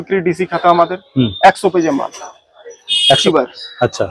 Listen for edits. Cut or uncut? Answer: cut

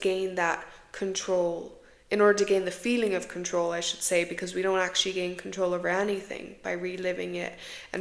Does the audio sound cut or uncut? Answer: uncut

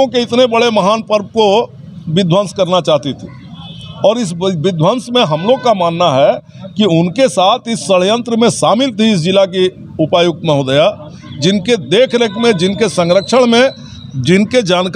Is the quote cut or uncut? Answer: uncut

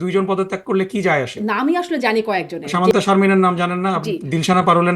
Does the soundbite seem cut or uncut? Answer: cut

